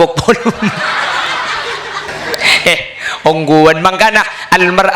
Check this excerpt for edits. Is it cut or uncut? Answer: cut